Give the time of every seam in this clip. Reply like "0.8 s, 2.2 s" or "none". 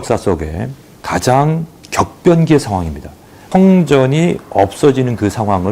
3.4 s